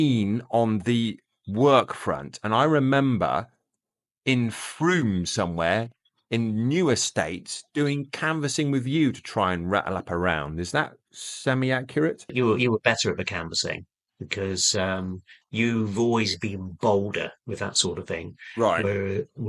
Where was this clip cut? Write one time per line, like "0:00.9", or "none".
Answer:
0:12.3